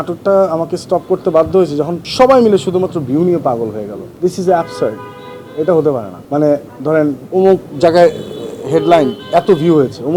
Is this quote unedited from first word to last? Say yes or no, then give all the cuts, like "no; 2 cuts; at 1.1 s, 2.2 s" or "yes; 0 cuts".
no; 4 cuts; at 2.0 s, 4.0 s, 6.1 s, 7.2 s